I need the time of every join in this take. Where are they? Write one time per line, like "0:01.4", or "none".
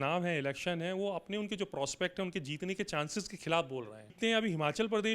0:04.1